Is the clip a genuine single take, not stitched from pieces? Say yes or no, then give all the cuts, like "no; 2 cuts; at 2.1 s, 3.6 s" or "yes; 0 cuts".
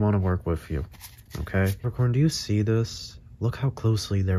no; 1 cut; at 1.9 s